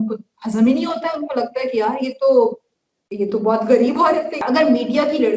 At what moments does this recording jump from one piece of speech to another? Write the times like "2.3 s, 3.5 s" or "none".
4.3 s